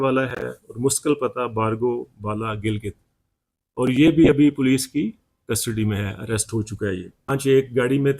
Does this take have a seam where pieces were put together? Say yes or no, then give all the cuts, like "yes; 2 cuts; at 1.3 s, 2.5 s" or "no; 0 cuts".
yes; 1 cut; at 7.3 s